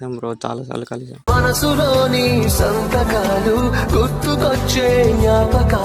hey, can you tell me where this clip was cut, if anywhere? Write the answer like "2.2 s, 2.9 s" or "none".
1.3 s